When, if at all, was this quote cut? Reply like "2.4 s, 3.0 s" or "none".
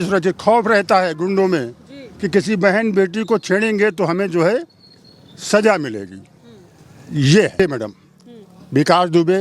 7.6 s